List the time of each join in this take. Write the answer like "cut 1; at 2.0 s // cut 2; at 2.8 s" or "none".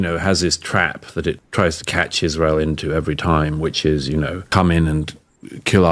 cut 1; at 1.4 s // cut 2; at 4.4 s

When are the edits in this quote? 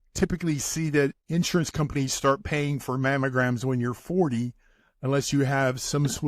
cut 1; at 1.2 s

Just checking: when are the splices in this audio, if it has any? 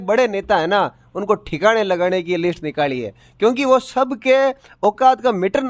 none

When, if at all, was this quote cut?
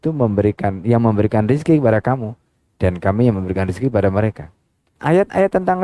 cut 1; at 4.9 s

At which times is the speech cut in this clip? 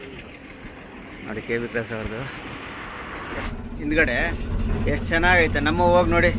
cut 1; at 3.5 s

